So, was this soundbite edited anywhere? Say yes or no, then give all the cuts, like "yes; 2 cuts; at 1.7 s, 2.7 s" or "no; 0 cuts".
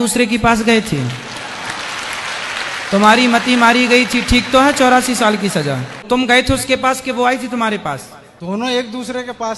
yes; 2 cuts; at 6.0 s, 7.8 s